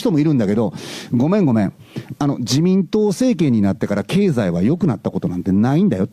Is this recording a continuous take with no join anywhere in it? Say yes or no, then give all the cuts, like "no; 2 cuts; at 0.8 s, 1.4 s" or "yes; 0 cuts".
yes; 0 cuts